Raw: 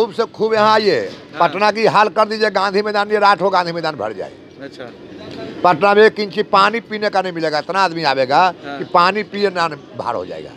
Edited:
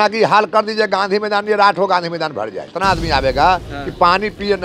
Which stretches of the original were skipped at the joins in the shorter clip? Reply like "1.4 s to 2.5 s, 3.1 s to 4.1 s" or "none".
4.4 s to 7.7 s

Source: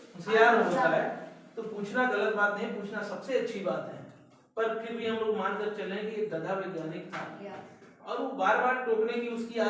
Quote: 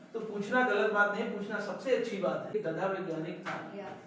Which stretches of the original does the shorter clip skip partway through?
4.0 s to 6.2 s

